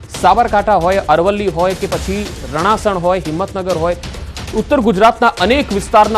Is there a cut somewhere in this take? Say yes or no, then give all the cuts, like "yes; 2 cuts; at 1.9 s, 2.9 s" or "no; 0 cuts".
no; 0 cuts